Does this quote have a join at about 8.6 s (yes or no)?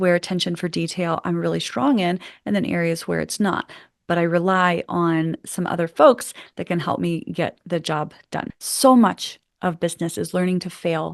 yes